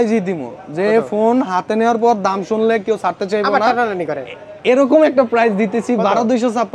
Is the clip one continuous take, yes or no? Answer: yes